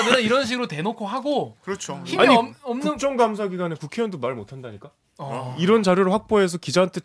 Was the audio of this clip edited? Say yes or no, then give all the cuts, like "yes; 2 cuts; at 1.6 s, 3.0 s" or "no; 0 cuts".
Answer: no; 0 cuts